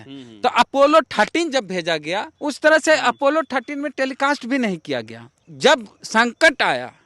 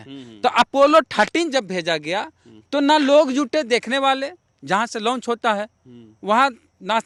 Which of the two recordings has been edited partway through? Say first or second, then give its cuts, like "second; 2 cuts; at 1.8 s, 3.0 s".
first; 2 cuts; at 2.3 s, 5.4 s